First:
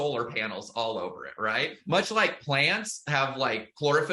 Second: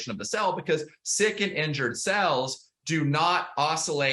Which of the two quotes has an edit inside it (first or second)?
first